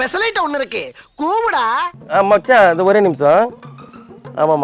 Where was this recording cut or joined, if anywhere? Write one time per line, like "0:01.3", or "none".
0:02.0